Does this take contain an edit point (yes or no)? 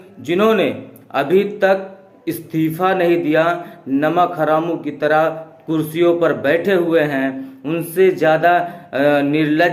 no